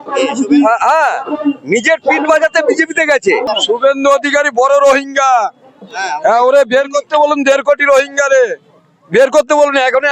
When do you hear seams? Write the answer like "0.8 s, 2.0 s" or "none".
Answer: 3.4 s